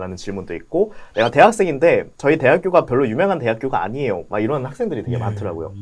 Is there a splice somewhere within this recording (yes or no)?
no